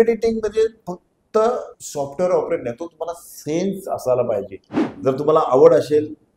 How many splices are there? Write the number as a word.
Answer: one